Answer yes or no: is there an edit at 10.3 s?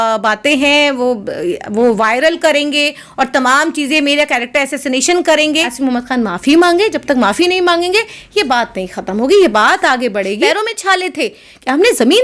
yes